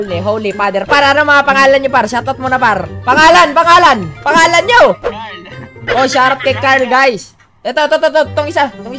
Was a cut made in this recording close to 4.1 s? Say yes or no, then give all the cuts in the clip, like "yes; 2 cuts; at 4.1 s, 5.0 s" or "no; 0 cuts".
yes; 2 cuts; at 2.9 s, 4.1 s